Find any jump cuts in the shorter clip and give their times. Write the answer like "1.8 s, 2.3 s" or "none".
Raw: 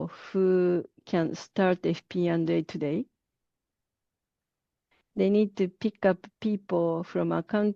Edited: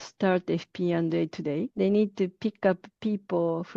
1.7 s